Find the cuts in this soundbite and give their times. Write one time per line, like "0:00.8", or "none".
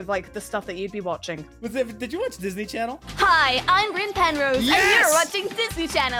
none